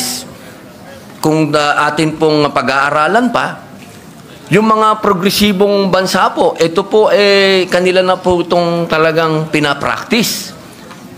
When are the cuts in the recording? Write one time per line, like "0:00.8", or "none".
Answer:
none